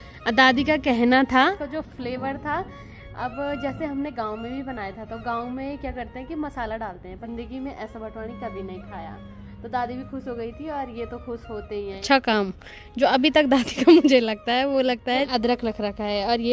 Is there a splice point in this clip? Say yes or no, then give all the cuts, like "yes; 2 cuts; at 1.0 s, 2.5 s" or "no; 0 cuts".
yes; 4 cuts; at 1.5 s, 7.2 s, 12.0 s, 15.3 s